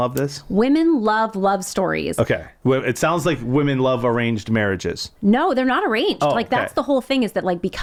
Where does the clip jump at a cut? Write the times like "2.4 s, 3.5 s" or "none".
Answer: none